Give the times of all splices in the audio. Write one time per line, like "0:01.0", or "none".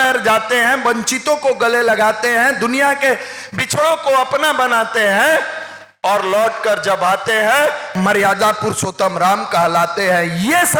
0:07.9